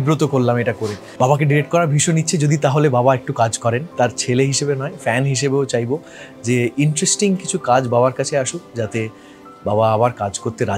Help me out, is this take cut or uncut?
cut